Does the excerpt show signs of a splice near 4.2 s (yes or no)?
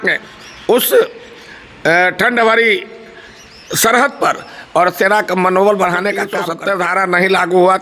no